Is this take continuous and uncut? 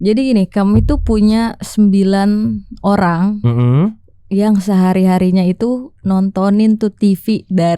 yes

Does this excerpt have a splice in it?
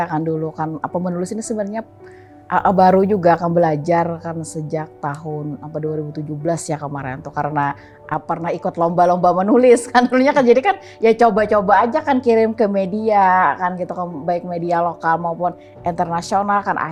no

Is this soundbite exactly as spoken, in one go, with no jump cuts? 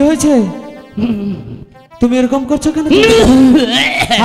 yes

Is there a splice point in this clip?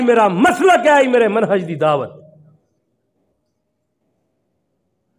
no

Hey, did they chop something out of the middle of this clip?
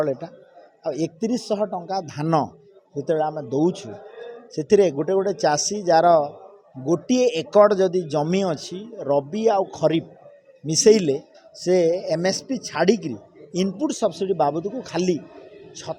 no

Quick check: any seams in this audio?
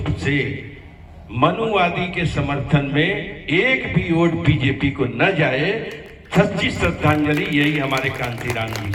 no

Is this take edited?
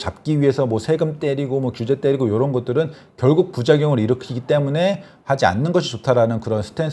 no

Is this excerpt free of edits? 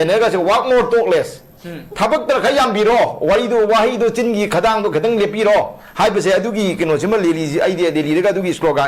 yes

